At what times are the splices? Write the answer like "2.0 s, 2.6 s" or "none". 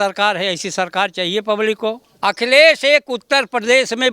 2.1 s